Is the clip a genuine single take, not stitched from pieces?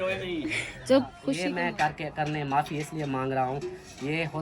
no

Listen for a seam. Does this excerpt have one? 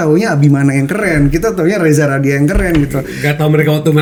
no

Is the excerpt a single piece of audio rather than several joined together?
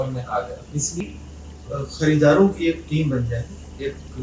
no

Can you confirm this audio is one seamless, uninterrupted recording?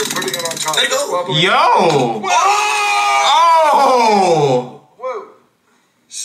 yes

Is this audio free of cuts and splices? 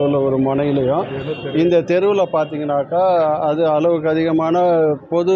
yes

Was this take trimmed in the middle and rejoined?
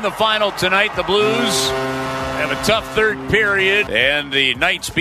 yes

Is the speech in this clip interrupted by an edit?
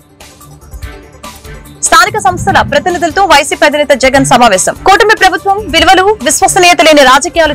yes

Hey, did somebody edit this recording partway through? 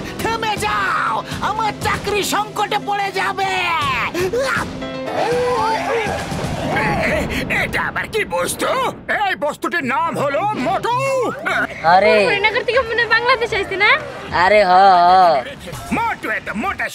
no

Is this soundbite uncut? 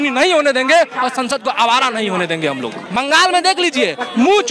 no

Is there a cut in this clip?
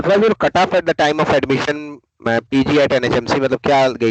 no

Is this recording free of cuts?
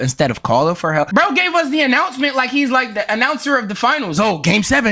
no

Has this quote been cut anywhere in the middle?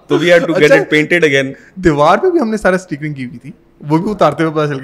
no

